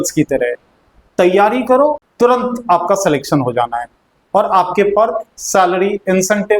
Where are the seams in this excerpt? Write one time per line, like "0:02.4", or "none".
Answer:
0:02.1